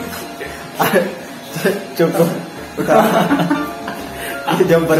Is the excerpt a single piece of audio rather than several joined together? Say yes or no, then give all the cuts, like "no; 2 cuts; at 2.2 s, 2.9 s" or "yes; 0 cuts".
yes; 0 cuts